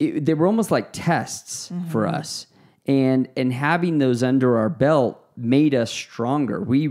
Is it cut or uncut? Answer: uncut